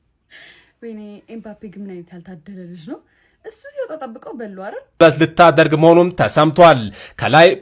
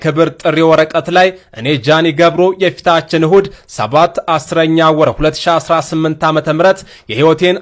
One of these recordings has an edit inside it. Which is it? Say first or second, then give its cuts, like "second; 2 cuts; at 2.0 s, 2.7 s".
first; 1 cut; at 5.0 s